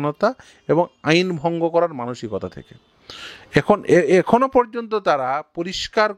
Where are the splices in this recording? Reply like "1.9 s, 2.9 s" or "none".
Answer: none